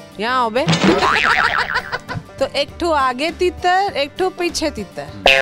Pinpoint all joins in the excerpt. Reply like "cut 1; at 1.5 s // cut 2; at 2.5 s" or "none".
cut 1; at 2.2 s